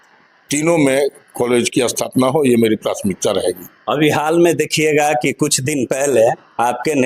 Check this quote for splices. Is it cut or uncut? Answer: uncut